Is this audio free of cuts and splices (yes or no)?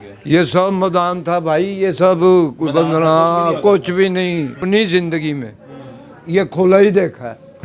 no